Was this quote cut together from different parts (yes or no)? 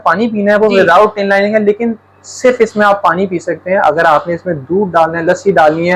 no